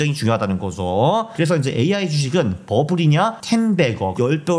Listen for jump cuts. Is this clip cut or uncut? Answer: cut